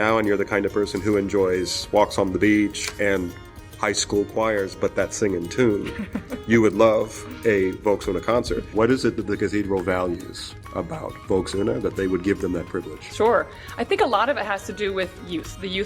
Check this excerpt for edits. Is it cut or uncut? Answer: cut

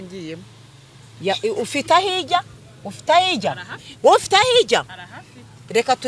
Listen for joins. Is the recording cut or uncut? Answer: uncut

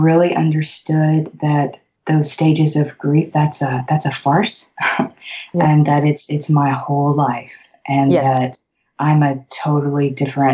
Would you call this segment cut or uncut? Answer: cut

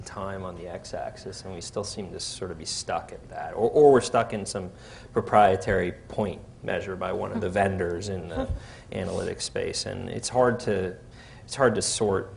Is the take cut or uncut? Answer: cut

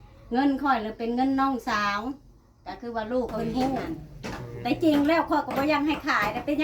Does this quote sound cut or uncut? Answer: cut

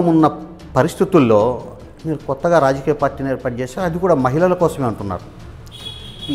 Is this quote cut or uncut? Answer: uncut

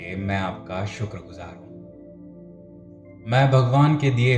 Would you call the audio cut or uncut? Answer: cut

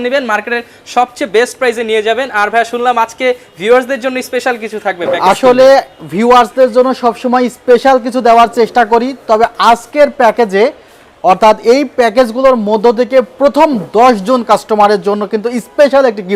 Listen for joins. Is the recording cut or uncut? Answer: uncut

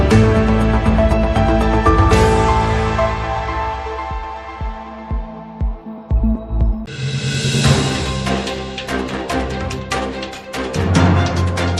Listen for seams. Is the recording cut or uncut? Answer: cut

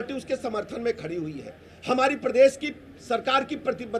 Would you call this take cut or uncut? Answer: uncut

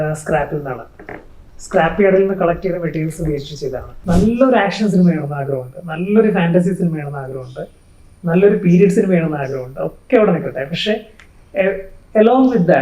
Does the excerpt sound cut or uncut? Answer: cut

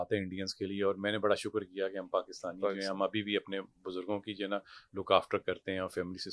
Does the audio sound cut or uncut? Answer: uncut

